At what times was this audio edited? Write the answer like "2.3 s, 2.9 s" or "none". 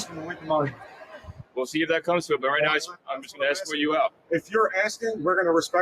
none